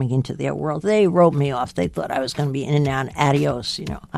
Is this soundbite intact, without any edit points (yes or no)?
yes